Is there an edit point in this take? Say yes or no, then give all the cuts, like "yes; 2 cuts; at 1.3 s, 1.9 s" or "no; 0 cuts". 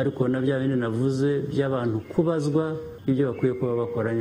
yes; 1 cut; at 2.9 s